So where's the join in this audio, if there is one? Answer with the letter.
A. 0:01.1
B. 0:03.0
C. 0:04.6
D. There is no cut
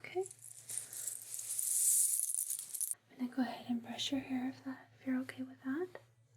B